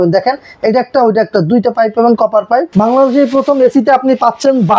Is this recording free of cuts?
no; 1 cut; at 2.7 s

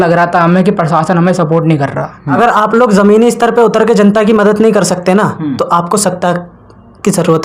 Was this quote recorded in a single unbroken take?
no; 1 cut; at 2.4 s

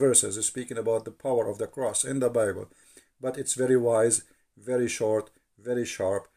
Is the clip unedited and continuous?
yes; 0 cuts

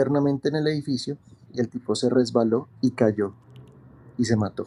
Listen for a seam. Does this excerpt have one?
no; 0 cuts

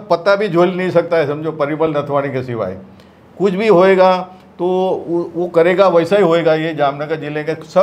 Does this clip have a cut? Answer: no; 0 cuts

